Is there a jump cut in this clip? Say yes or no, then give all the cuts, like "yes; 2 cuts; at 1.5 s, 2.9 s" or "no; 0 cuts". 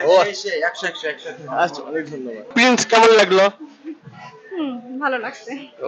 yes; 1 cut; at 2.5 s